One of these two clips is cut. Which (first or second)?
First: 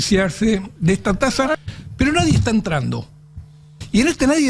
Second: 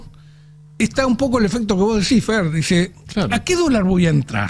first